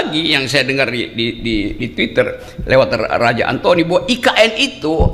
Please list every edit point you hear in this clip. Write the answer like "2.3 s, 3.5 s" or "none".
none